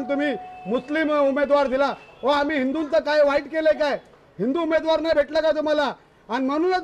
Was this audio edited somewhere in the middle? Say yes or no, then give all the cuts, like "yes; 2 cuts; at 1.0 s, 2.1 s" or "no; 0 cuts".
no; 0 cuts